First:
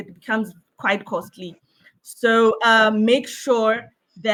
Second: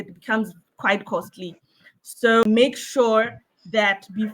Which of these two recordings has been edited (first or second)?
second